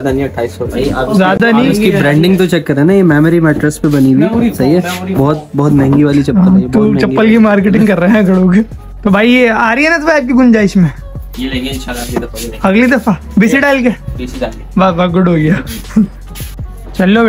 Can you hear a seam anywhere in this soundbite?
no; 0 cuts

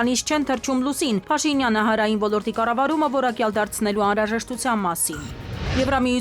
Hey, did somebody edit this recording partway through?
no; 0 cuts

